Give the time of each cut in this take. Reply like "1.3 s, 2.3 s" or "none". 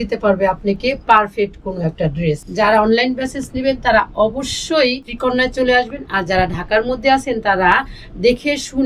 2.5 s, 5.1 s